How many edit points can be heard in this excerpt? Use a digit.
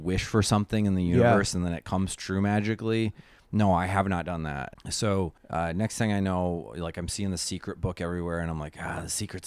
2